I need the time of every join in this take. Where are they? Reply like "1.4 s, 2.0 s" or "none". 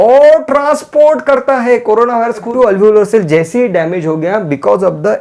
2.5 s